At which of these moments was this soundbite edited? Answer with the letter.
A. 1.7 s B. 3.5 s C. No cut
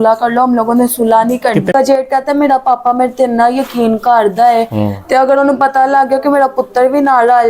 A